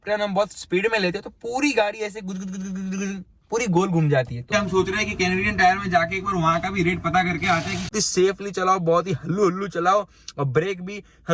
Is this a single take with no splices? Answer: no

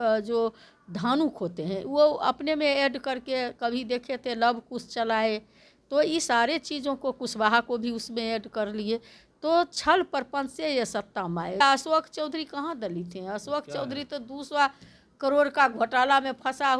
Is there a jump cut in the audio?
yes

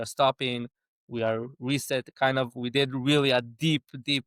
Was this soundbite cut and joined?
no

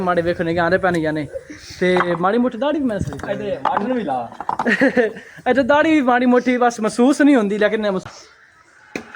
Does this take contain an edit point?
yes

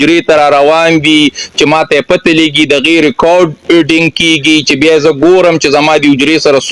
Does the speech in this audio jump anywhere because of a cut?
no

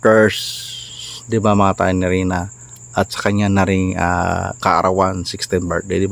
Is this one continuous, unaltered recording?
yes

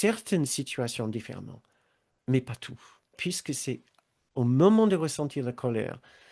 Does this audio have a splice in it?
yes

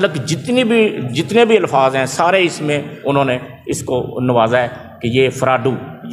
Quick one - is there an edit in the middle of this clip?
no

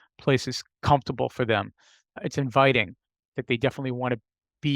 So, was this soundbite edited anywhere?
yes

